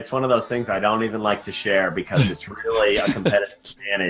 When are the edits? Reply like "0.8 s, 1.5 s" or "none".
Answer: none